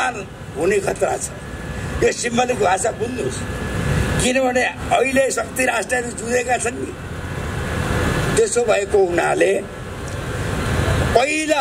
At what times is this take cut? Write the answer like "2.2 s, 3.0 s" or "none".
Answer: none